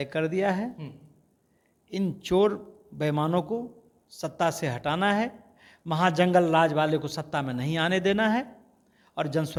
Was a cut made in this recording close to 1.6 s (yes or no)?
no